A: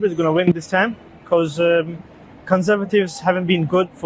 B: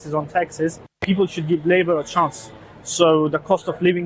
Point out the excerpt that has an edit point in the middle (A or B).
B